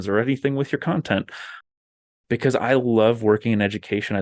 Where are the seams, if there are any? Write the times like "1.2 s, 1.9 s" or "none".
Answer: 2.2 s